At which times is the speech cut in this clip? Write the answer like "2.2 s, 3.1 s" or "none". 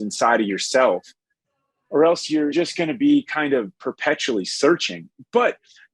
2.5 s